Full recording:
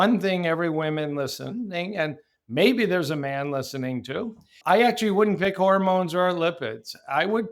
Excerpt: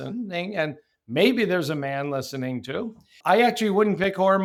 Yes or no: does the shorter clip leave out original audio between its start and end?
no